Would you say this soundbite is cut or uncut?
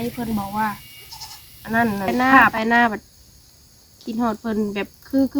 cut